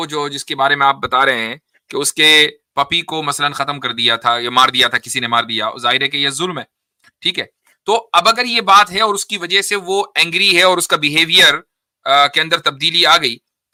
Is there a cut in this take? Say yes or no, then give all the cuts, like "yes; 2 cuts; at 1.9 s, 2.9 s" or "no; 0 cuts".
no; 0 cuts